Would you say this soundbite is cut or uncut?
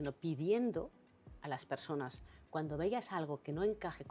uncut